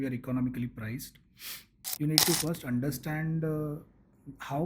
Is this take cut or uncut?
cut